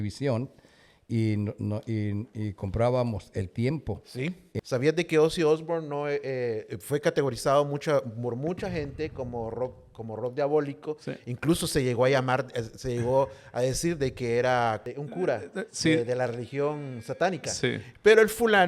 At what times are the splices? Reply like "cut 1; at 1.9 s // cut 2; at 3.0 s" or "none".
cut 1; at 4.5 s // cut 2; at 14.9 s